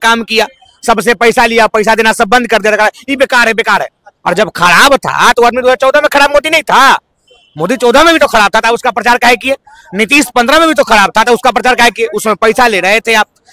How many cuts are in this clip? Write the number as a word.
zero